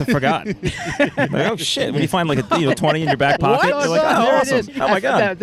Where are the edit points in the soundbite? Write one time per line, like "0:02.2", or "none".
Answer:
none